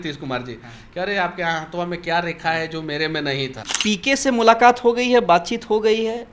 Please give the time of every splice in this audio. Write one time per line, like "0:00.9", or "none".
0:03.7